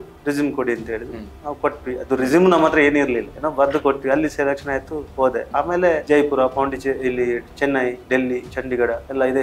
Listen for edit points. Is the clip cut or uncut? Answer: cut